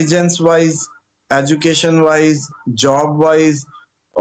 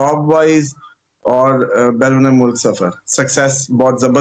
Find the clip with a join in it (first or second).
second